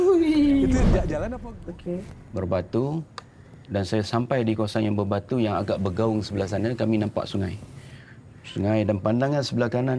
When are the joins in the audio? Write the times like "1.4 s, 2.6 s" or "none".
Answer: 1.2 s